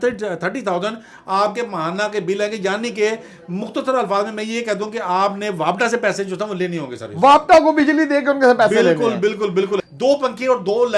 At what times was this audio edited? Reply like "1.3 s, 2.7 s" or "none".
9.8 s